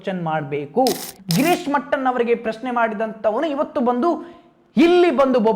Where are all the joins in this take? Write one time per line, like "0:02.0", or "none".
0:01.1